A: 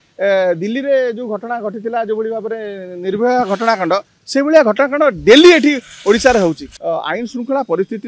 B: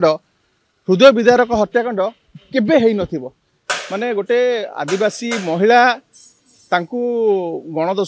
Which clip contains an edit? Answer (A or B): A